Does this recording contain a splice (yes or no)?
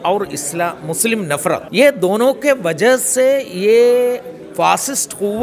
yes